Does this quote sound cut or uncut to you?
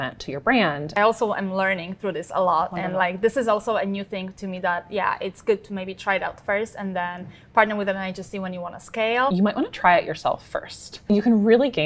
cut